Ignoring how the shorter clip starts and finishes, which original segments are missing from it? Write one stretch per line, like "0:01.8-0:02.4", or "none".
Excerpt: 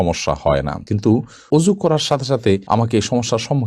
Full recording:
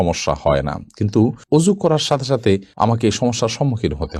0:02.6-0:02.7